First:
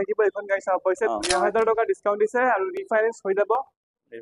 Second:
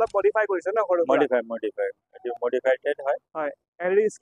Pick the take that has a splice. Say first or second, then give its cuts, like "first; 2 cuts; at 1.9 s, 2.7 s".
first; 1 cut; at 1.3 s